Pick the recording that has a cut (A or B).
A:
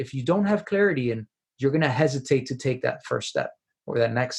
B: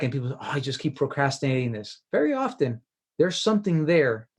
B